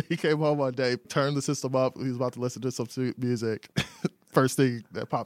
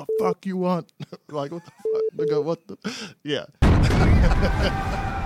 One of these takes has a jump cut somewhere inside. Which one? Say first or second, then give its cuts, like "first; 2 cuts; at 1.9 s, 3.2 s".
first; 2 cuts; at 1.1 s, 3.6 s